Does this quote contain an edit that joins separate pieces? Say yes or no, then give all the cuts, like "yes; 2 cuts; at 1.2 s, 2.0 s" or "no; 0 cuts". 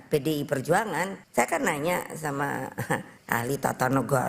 yes; 2 cuts; at 1.2 s, 3.1 s